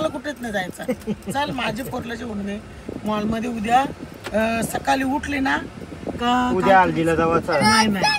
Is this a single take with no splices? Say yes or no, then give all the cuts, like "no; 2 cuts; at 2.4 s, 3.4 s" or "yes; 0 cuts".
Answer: yes; 0 cuts